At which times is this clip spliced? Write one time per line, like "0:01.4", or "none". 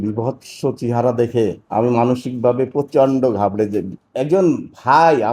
0:01.6
0:04.0